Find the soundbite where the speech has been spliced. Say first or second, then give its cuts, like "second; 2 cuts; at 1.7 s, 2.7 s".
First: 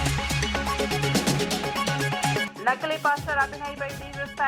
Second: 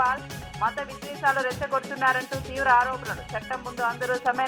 first; 2 cuts; at 0.8 s, 2.5 s